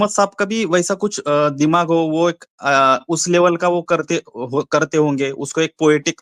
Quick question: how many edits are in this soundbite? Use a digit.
0